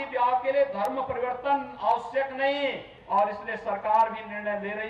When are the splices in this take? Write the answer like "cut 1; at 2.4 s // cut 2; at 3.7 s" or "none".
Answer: cut 1; at 2.9 s